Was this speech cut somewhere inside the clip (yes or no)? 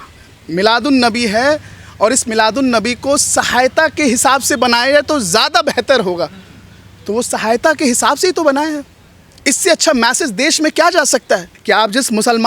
yes